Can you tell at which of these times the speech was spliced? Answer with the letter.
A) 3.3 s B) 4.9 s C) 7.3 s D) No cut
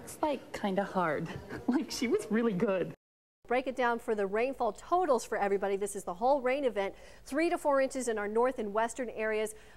A